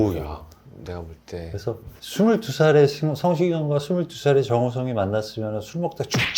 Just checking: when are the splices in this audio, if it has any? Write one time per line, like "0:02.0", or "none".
0:02.0